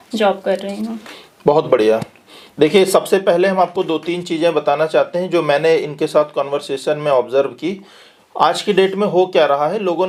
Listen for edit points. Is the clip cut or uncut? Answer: uncut